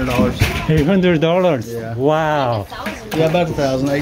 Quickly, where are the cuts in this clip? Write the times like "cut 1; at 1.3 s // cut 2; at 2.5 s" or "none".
none